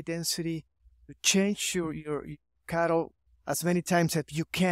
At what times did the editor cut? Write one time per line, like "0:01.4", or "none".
none